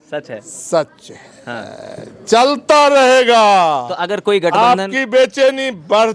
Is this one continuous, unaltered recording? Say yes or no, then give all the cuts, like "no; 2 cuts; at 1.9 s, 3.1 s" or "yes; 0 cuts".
yes; 0 cuts